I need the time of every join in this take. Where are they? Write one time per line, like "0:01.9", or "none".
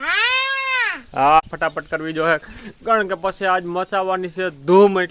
0:01.4